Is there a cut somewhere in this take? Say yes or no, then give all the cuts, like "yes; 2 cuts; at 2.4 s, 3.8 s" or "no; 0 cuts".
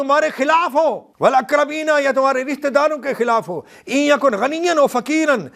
yes; 1 cut; at 1.1 s